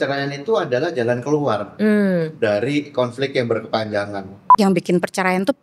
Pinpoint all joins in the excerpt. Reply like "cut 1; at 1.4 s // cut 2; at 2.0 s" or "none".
cut 1; at 4.5 s